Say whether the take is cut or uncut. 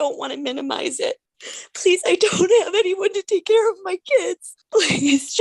cut